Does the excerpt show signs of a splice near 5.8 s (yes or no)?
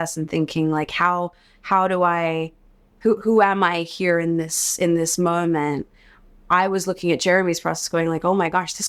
no